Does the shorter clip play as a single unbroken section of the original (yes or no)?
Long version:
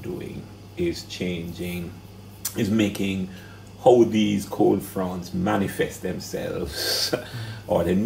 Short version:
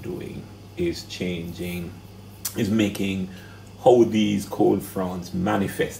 yes